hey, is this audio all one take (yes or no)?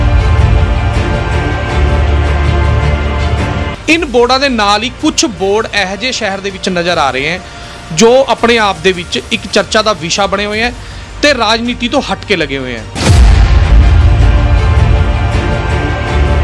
no